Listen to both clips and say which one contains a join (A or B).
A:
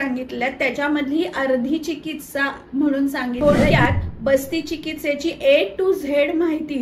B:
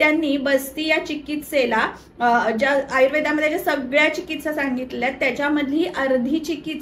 A